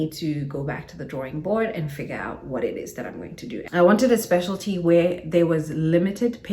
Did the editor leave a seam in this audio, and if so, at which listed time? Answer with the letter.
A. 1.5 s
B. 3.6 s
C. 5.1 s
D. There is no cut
B